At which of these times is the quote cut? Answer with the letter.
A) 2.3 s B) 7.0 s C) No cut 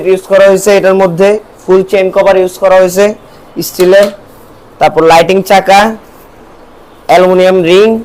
C